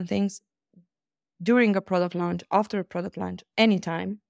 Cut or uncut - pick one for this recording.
uncut